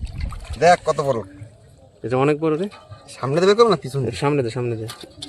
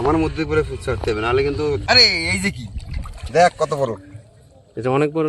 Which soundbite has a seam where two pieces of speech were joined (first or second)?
second